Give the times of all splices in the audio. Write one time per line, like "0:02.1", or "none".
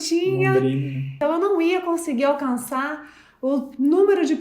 0:01.2